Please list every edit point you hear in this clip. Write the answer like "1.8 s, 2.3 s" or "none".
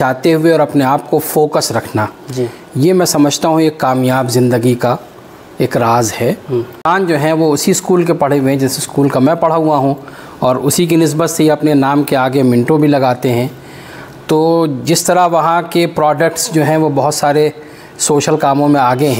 7.2 s